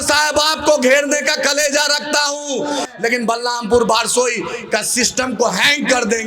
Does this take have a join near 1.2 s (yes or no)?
no